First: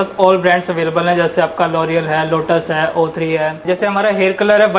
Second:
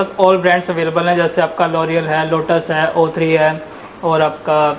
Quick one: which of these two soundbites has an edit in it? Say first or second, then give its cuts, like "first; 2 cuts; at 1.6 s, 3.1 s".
first; 1 cut; at 3.6 s